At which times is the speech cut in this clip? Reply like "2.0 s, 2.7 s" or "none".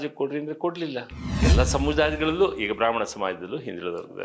1.2 s